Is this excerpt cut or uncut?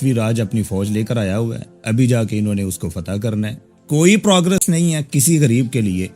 cut